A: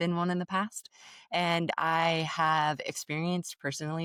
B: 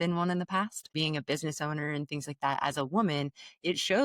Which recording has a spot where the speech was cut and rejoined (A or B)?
B